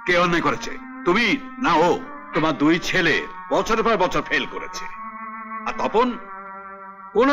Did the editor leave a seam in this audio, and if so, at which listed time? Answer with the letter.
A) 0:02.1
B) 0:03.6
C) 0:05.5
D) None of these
A